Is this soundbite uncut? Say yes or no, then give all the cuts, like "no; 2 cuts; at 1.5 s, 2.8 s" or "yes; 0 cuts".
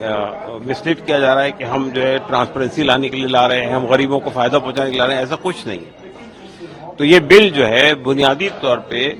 yes; 0 cuts